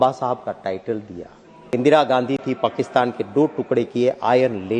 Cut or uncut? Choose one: cut